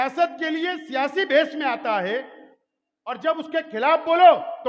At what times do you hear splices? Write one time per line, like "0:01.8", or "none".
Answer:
none